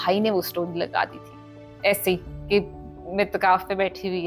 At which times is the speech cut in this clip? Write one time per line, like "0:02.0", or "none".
none